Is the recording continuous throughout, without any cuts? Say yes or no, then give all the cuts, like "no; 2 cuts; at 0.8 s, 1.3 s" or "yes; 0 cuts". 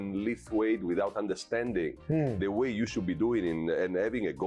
yes; 0 cuts